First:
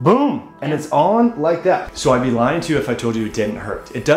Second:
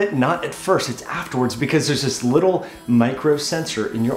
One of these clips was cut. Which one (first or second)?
first